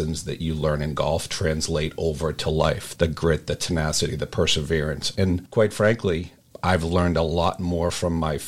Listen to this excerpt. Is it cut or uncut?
cut